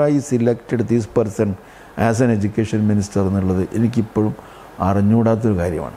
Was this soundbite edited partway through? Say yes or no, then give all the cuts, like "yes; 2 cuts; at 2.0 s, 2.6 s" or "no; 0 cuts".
no; 0 cuts